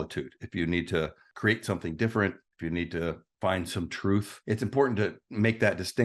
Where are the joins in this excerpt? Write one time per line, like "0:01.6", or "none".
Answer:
0:01.2
0:04.3